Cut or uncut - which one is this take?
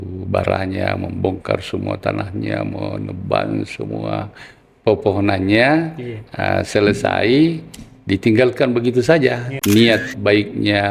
cut